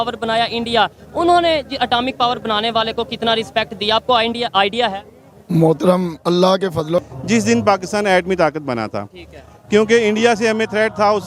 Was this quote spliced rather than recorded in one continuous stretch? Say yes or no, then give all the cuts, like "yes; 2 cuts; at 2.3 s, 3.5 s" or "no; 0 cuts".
yes; 1 cut; at 7.1 s